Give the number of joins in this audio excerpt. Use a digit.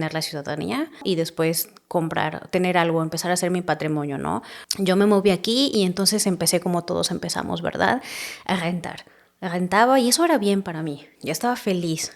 2